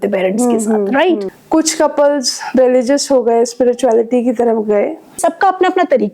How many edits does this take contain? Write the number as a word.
two